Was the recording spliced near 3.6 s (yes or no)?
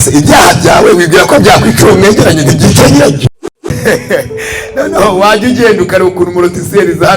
yes